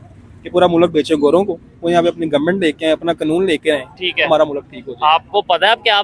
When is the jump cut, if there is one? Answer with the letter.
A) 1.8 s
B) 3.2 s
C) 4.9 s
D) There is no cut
D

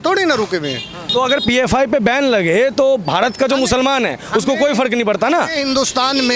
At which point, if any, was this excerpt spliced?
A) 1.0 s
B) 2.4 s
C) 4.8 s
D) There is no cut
A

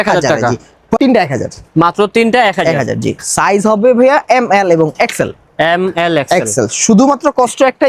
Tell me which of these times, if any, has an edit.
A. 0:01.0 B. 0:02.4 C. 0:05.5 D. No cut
A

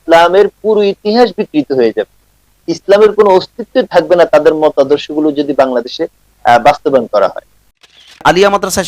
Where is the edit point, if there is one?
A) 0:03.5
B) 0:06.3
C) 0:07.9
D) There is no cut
C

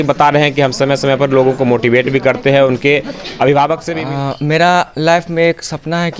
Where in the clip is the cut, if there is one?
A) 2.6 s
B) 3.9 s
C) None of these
B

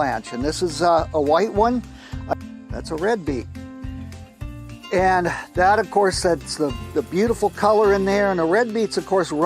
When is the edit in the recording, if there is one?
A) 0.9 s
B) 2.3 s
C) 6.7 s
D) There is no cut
B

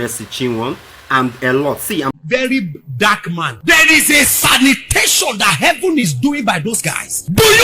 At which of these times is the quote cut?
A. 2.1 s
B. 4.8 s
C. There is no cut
A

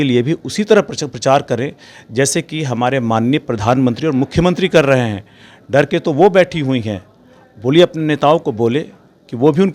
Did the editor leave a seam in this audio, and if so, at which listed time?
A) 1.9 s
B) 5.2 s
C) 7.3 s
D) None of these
D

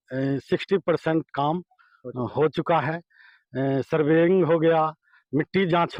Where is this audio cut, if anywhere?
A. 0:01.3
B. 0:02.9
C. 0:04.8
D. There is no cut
D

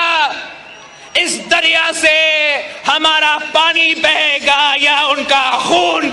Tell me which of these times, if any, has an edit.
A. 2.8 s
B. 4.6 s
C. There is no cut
C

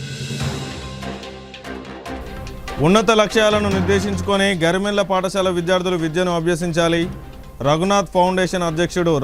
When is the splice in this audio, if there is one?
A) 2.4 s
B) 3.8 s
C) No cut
A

